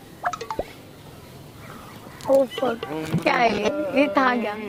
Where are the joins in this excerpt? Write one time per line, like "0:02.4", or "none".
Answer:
none